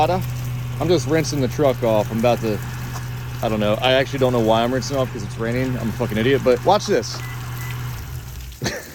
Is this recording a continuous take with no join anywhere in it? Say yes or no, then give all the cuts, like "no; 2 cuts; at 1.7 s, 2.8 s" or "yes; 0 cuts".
yes; 0 cuts